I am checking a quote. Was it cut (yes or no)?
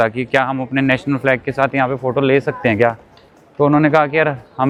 no